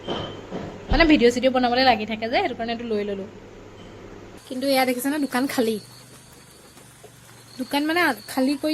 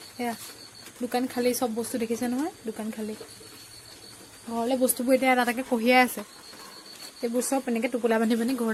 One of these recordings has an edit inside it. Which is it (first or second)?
first